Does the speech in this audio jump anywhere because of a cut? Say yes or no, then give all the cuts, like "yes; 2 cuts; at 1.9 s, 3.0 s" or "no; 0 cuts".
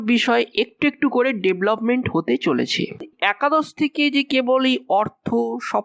yes; 1 cut; at 3.1 s